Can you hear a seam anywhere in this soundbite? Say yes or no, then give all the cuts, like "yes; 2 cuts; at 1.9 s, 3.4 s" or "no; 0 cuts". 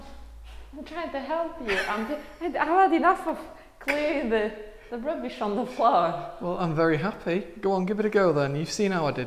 no; 0 cuts